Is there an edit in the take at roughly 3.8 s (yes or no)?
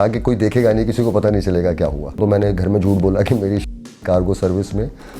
no